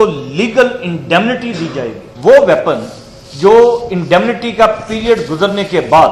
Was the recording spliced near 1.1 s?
no; 1 cut; at 2.3 s

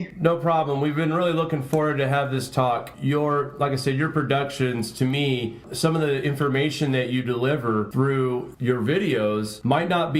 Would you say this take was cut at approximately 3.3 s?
yes; 1 cut; at 3.3 s

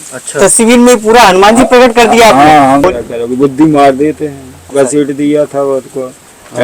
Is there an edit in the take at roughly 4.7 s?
yes; 2 cuts; at 2.8 s, 4.7 s

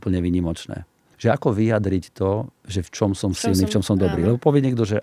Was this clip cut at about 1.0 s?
yes; 1 cut; at 1.0 s

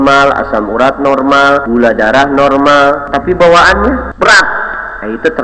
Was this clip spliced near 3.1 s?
yes; 3 cuts; at 1.7 s, 3.1 s, 4.1 s

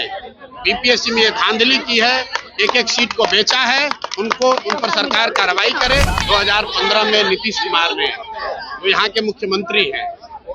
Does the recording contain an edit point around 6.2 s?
yes; 1 cut; at 6.2 s

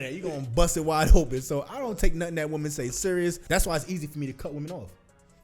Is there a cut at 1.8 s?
no; 1 cut; at 3.4 s

